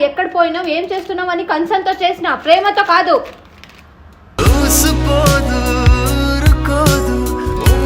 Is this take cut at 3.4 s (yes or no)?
no